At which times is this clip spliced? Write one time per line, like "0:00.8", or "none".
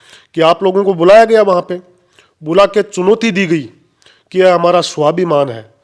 none